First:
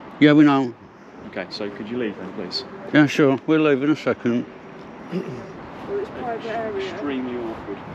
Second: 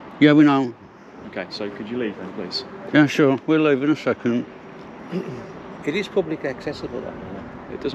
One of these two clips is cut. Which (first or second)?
first